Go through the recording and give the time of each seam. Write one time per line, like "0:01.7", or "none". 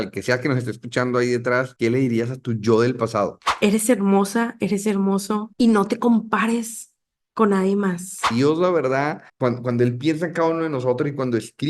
0:01.7
0:03.5
0:08.3